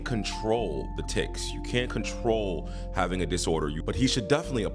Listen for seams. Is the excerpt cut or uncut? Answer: uncut